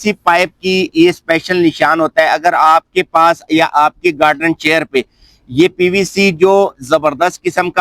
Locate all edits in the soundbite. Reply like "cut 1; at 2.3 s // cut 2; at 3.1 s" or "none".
none

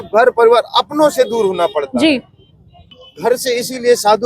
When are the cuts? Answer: cut 1; at 2.9 s

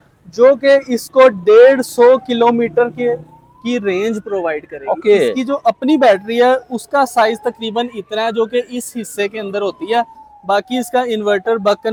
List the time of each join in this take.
none

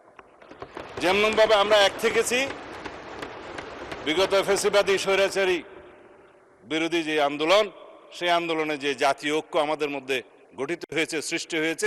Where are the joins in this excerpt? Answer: none

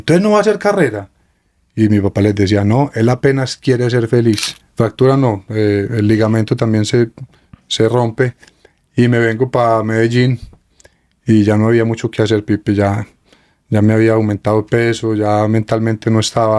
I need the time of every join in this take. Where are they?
cut 1; at 4.6 s

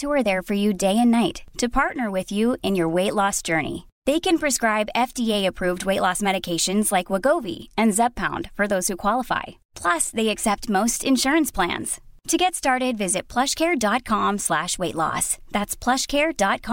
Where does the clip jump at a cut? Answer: none

